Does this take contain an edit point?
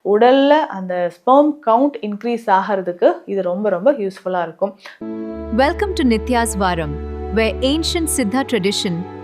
yes; 1 cut; at 4.9 s

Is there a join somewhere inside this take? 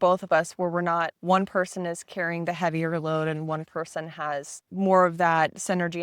yes; 2 cuts; at 1.1 s, 4.6 s

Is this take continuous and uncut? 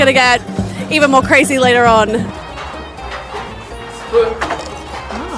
no; 1 cut; at 2.3 s

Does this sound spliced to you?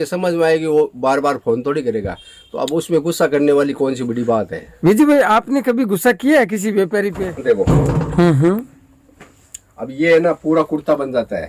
yes; 1 cut; at 7.2 s

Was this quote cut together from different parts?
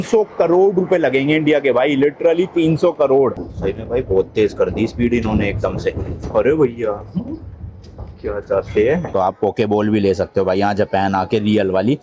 yes; 2 cuts; at 3.3 s, 9.1 s

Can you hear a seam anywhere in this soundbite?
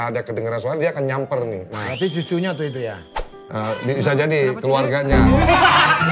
no; 0 cuts

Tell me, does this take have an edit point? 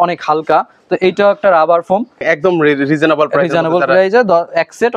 yes; 1 cut; at 2.2 s

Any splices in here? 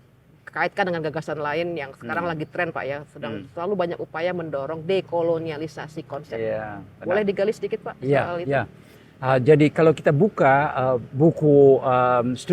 no; 0 cuts

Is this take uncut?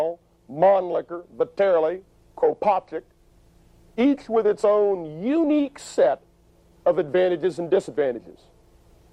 no; 1 cut; at 7.4 s

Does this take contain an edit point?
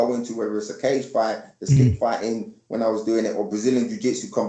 no; 0 cuts

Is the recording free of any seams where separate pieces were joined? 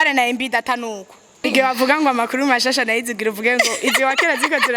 no; 1 cut; at 1.5 s

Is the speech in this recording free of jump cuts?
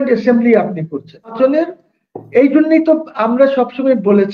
no; 1 cut; at 1.3 s

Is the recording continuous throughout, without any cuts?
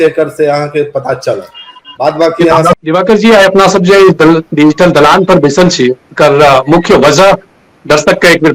no; 1 cut; at 2.7 s

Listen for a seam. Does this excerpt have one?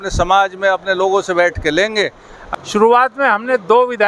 yes; 1 cut; at 2.3 s

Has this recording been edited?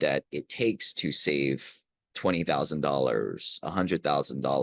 no; 0 cuts

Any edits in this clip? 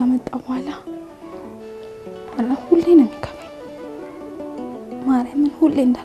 yes; 4 cuts; at 0.8 s, 2.3 s, 3.2 s, 5.0 s

